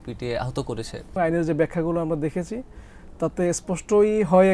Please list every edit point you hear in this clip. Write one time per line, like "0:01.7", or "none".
0:01.1